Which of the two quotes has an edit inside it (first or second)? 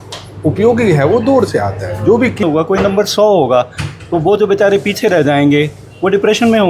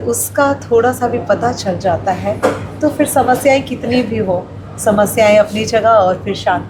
first